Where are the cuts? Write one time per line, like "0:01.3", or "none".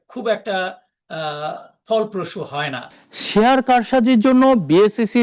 0:02.9

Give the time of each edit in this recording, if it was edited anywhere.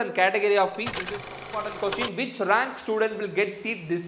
0:01.3

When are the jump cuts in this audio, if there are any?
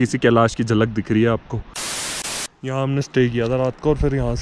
0:02.0

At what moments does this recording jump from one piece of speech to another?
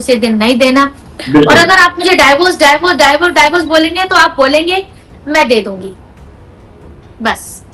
none

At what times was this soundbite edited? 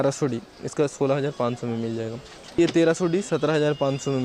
0:02.6

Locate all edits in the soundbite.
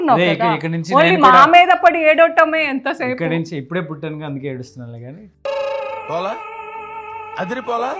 none

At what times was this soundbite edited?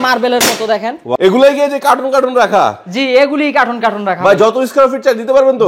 0:01.0

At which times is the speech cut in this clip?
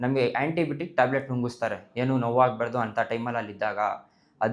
none

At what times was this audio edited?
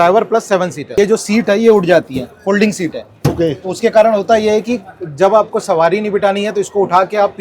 0:00.9

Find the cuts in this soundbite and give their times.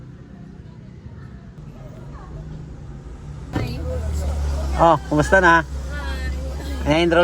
0:01.6
0:03.5

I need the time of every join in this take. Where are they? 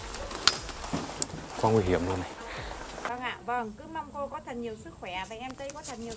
0:03.1

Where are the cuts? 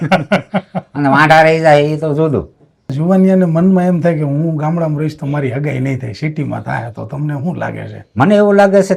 0:02.9

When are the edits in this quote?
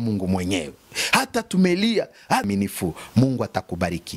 0:02.4

